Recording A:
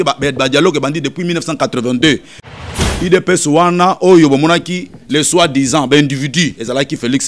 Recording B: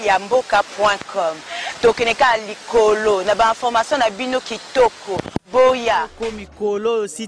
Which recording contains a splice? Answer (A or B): A